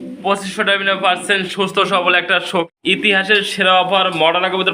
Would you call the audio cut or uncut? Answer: cut